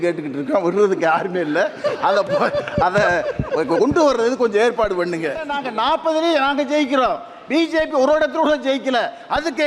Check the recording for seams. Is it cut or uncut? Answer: cut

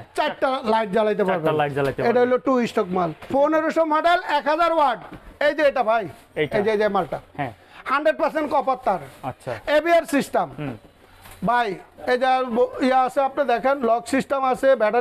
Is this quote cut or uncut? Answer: cut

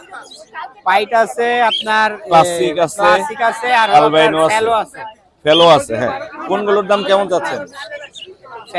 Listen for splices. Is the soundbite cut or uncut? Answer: uncut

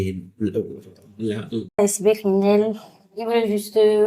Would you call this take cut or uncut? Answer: cut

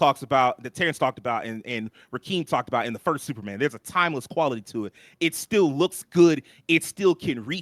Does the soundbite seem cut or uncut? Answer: uncut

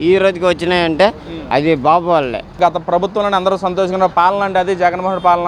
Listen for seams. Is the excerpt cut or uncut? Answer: cut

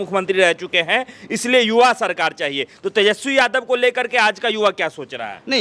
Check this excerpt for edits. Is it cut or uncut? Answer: uncut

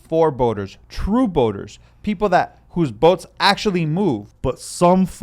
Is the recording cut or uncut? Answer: cut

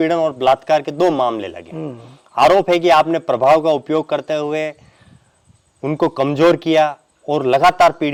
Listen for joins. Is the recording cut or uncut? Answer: uncut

